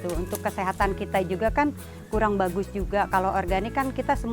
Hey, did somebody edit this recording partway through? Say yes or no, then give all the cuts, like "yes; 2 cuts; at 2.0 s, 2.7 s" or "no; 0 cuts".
yes; 1 cut; at 3.1 s